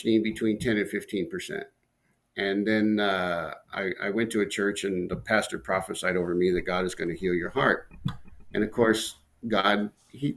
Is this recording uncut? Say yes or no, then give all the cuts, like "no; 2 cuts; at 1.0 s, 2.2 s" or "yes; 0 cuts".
yes; 0 cuts